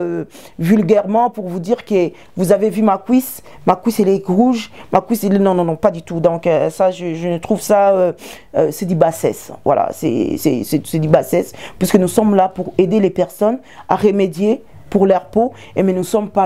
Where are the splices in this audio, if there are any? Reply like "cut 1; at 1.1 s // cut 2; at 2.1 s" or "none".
none